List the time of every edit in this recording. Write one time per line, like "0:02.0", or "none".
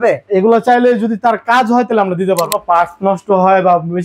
0:02.4